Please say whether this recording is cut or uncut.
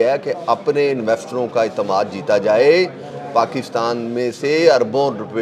uncut